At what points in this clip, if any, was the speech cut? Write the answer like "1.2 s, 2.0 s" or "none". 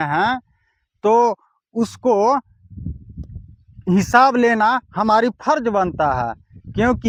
none